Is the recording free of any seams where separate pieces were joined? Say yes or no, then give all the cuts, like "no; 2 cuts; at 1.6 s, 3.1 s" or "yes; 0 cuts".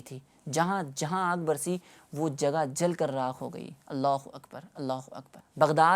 yes; 0 cuts